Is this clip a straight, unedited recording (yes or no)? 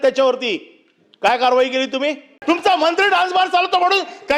no